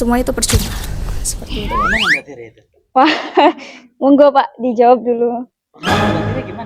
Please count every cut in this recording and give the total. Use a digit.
1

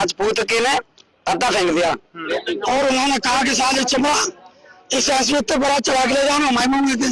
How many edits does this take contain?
1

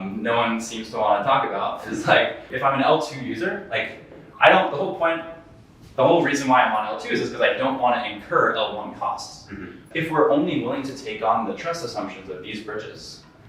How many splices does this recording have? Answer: 2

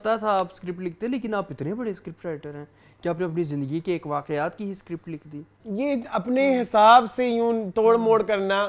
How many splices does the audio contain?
1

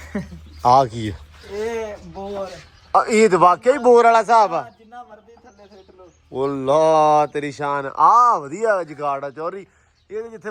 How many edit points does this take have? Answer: 0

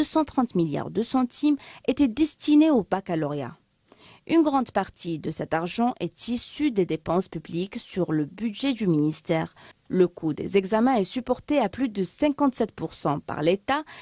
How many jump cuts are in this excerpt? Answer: 0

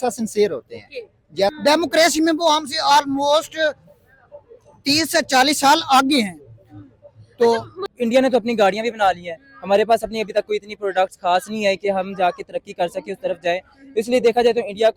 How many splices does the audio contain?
2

